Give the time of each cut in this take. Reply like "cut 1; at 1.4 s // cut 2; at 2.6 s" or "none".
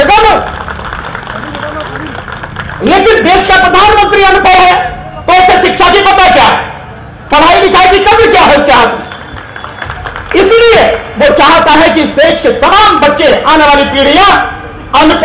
none